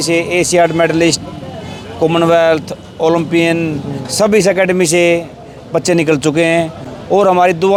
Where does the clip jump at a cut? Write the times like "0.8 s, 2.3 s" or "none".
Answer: none